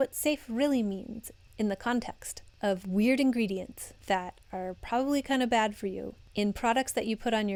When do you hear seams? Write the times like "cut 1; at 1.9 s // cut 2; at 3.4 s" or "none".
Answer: none